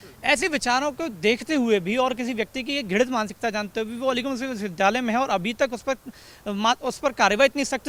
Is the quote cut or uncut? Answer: uncut